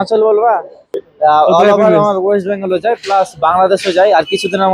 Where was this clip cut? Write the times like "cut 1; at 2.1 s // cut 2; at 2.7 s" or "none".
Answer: cut 1; at 1.0 s